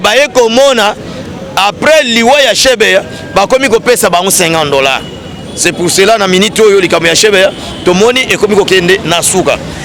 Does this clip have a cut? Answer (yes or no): no